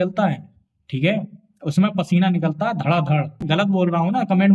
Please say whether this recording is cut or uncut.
cut